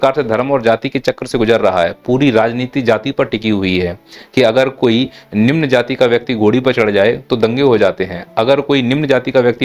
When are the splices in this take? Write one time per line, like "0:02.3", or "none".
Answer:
none